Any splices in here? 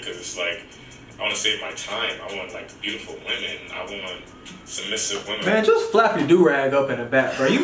no; 0 cuts

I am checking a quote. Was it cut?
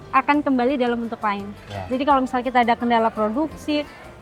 no; 0 cuts

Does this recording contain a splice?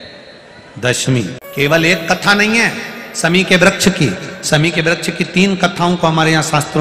yes; 1 cut; at 1.4 s

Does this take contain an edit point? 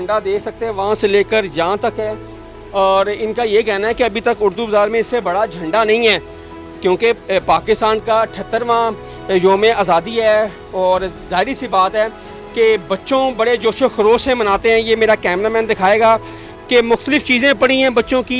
no; 0 cuts

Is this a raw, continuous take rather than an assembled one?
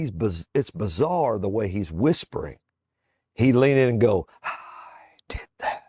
yes; 0 cuts

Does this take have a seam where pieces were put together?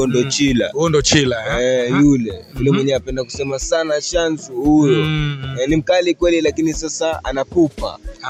no; 0 cuts

